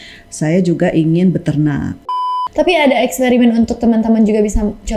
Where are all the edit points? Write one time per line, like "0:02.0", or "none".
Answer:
0:02.1